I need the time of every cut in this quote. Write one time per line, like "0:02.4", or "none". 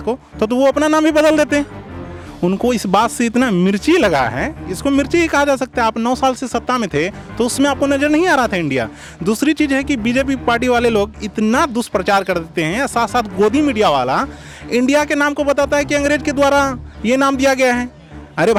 none